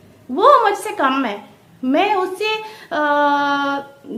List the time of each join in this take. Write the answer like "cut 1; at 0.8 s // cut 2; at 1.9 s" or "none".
none